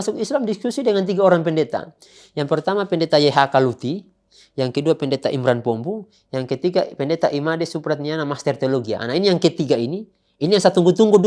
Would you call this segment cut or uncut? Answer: uncut